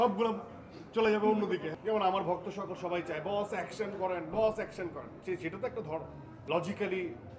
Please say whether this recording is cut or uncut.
cut